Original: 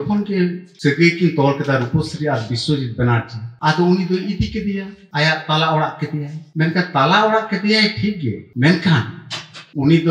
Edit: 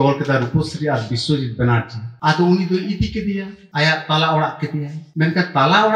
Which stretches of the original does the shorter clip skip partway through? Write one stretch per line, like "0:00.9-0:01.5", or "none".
none